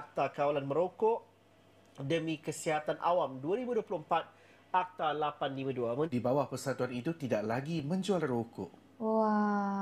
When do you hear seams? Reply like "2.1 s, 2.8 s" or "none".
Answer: 6.1 s